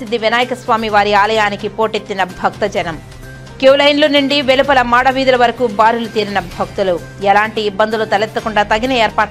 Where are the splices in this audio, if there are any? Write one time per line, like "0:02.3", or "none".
none